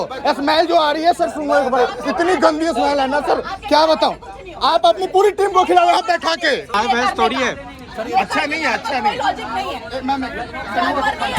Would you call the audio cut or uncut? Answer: cut